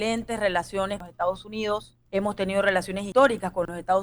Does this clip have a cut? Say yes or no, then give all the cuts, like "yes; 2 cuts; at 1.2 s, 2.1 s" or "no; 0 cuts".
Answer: yes; 3 cuts; at 1.1 s, 2.0 s, 3.0 s